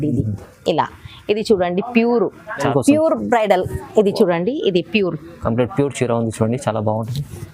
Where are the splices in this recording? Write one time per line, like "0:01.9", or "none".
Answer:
0:02.7